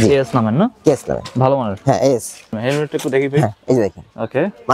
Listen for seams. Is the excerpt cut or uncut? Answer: cut